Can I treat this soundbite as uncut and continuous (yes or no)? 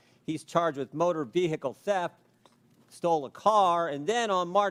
yes